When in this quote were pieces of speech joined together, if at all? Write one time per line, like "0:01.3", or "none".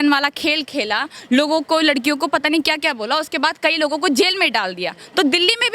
none